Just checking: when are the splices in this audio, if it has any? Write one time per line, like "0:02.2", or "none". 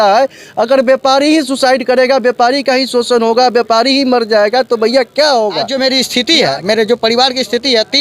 0:05.7